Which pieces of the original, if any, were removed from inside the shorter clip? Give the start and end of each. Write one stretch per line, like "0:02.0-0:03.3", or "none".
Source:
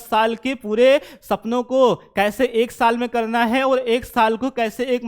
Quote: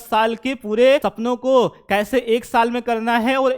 0:01.1-0:01.4